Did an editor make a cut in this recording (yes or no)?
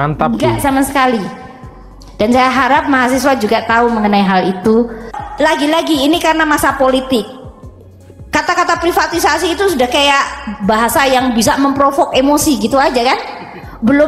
yes